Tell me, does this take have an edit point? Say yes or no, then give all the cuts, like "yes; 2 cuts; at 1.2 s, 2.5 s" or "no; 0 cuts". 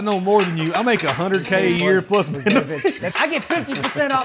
yes; 1 cut; at 3.1 s